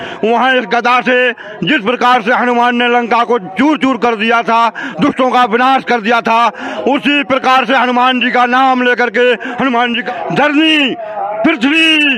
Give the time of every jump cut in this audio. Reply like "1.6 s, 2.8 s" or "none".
10.0 s